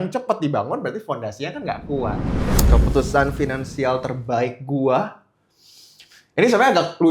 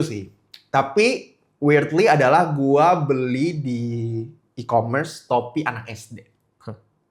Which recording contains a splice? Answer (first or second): first